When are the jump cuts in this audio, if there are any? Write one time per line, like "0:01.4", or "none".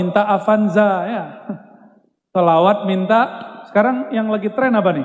none